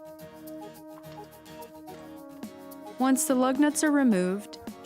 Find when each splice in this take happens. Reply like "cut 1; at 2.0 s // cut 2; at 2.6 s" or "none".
cut 1; at 2.9 s